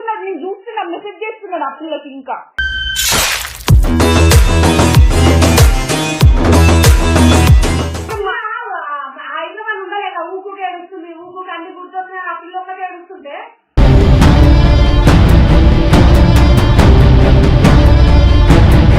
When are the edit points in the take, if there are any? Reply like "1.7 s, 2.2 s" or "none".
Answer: 8.1 s